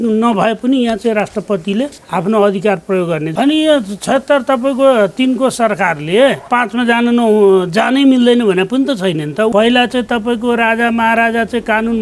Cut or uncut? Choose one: cut